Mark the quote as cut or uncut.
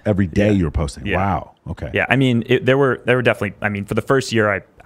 uncut